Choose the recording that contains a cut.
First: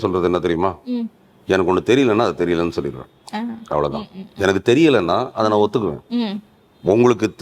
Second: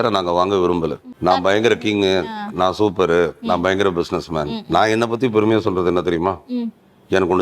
second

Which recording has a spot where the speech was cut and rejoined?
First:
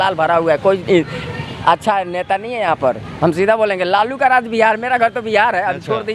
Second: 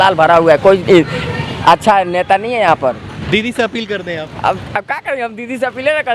second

